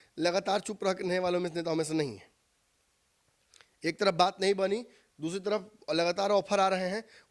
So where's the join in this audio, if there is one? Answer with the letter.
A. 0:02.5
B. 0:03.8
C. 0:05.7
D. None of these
D